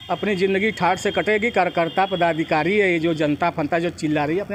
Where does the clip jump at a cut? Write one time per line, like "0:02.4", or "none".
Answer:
none